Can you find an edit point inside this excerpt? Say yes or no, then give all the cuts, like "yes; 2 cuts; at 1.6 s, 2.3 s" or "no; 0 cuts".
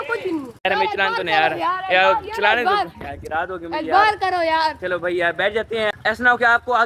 no; 0 cuts